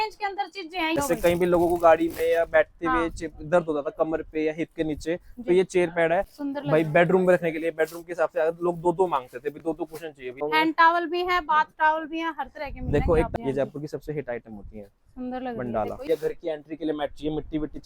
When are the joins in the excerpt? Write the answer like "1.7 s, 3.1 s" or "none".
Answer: 1.0 s, 6.4 s, 10.4 s, 13.3 s, 16.0 s